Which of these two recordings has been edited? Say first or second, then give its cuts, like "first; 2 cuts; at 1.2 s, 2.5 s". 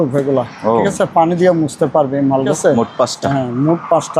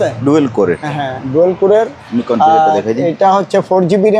first; 1 cut; at 2.5 s